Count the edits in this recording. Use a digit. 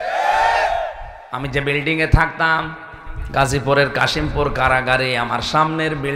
1